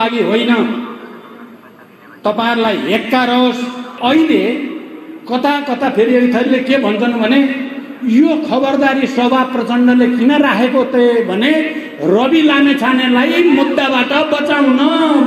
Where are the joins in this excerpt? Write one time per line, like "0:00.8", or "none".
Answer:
0:03.9